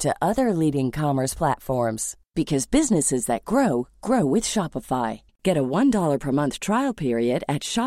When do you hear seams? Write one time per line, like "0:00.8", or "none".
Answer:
none